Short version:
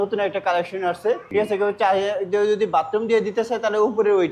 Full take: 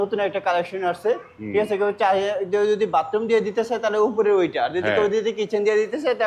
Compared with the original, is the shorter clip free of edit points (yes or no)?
no